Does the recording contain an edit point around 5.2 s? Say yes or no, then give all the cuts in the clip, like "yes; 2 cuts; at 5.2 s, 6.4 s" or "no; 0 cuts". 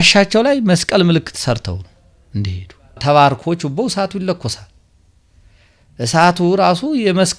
no; 1 cut; at 3.0 s